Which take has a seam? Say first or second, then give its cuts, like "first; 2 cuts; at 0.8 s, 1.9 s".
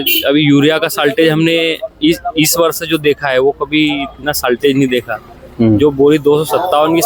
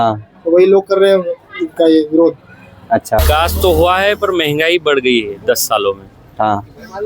second; 1 cut; at 3.2 s